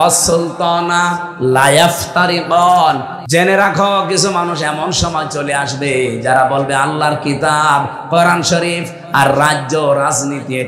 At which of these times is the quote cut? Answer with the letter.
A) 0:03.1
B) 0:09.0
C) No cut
A